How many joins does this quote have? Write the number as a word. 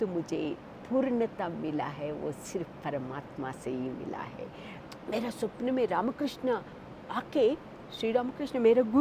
one